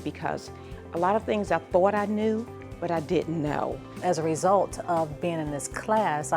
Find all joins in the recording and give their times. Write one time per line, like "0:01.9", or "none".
0:03.9